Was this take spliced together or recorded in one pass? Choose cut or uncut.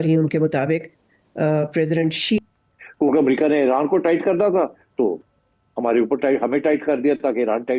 cut